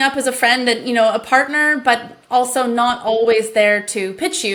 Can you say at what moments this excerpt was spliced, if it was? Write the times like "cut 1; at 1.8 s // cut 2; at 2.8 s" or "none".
none